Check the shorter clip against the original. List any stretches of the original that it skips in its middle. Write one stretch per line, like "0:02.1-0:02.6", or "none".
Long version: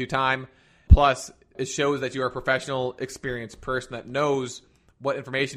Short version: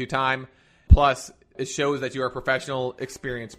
none